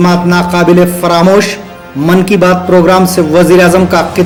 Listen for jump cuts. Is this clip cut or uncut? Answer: uncut